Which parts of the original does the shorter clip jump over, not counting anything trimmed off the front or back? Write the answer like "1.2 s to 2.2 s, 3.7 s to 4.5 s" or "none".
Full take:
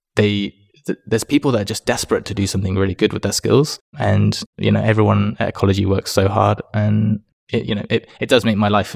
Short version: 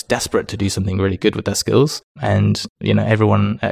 none